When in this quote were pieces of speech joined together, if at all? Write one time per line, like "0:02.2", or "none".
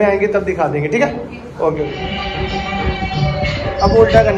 0:02.0

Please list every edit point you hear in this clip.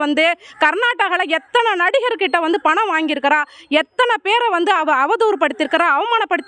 none

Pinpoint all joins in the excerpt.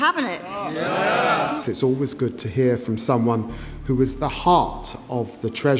0:01.5

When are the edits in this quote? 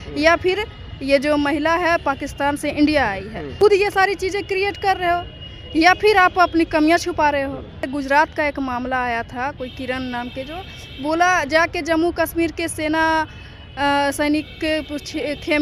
0:03.5
0:07.9

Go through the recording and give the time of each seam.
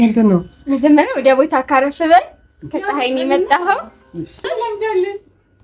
0:04.5

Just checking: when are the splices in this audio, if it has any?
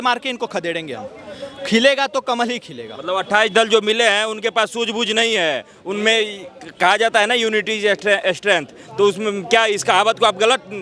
none

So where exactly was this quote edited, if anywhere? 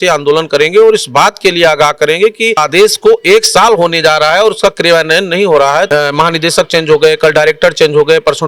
0:02.6
0:05.9

